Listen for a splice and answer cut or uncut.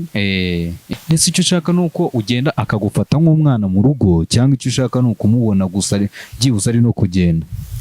cut